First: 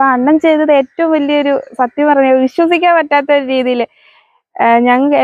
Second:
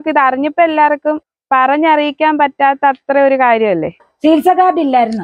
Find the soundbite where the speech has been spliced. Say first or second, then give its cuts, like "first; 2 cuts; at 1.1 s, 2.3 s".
second; 2 cuts; at 1.3 s, 4.0 s